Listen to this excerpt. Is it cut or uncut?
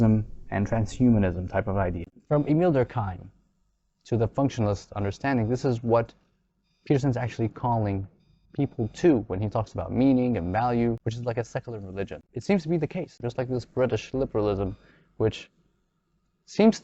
cut